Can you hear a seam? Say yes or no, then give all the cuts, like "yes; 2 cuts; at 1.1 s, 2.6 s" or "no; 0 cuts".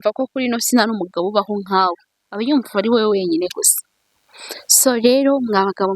no; 0 cuts